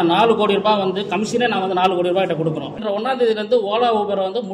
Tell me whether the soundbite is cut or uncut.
cut